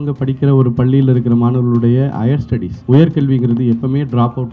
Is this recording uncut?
yes; 0 cuts

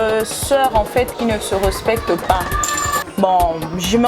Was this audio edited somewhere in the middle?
yes; 1 cut; at 2.9 s

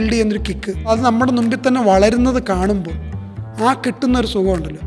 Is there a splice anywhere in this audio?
yes; 1 cut; at 0.9 s

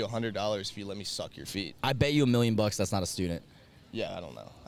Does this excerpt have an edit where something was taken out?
no; 0 cuts

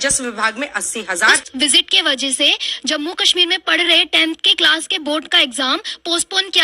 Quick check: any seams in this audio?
yes; 1 cut; at 1.4 s

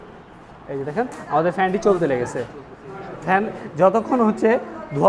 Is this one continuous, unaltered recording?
yes; 0 cuts

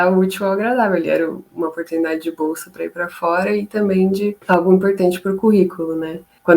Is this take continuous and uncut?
no; 1 cut; at 4.4 s

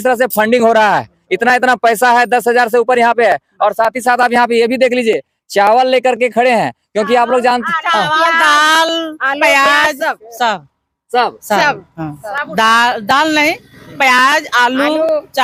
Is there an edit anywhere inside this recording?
no; 0 cuts

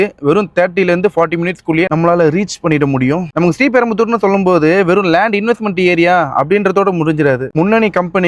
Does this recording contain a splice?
no; 0 cuts

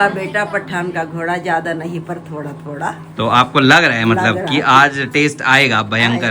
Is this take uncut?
yes; 0 cuts

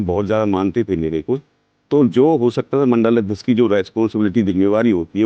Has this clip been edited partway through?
no; 0 cuts

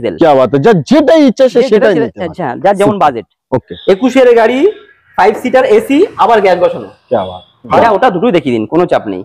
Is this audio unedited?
no; 2 cuts; at 3.7 s, 7.7 s

